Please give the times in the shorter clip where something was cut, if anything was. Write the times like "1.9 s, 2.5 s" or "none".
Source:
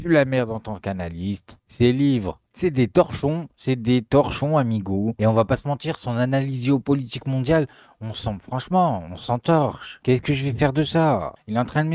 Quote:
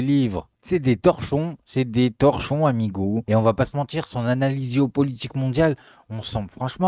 none